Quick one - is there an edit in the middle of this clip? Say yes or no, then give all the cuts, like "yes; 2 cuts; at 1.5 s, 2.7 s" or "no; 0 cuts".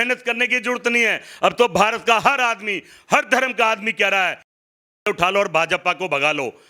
no; 0 cuts